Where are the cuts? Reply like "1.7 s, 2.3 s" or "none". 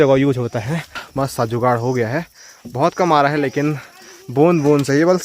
1.0 s